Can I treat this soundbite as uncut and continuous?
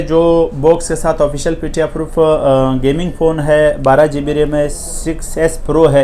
yes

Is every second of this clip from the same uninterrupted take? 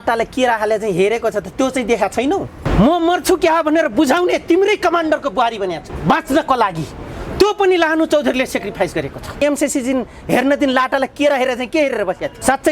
no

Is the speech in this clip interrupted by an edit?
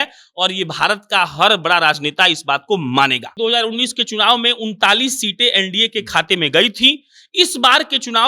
yes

